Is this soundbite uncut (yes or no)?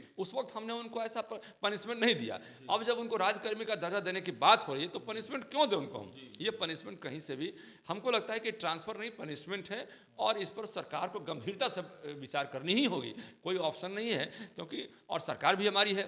yes